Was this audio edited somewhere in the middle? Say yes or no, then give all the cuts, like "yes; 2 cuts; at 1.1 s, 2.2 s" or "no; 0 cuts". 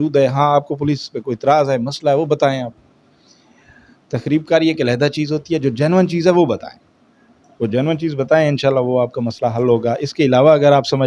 no; 0 cuts